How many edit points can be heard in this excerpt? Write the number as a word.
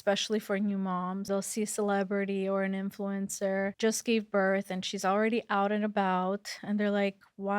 two